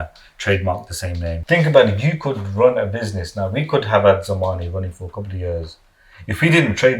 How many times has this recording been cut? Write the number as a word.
one